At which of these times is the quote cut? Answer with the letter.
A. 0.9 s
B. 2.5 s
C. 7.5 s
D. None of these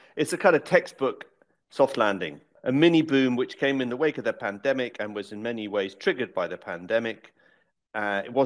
B